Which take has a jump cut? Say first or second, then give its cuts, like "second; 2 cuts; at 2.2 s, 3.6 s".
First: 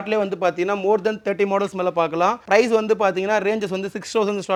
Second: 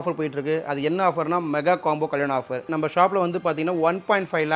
second; 1 cut; at 2.7 s